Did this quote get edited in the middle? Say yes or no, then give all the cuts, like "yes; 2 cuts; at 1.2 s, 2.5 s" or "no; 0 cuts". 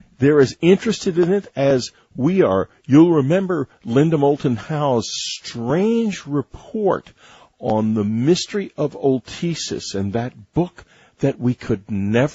yes; 1 cut; at 10.6 s